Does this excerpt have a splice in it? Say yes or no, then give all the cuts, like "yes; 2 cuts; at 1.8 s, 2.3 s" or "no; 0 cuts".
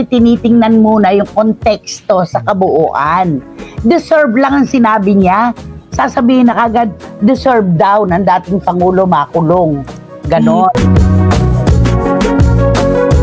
yes; 1 cut; at 11.3 s